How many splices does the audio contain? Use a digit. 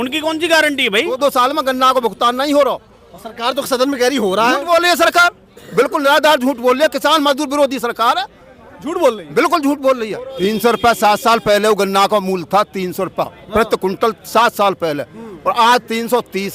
2